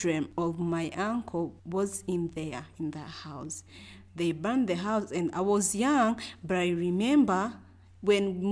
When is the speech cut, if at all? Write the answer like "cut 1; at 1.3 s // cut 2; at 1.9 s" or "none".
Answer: none